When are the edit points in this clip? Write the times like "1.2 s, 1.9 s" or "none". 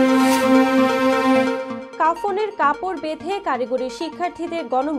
1.8 s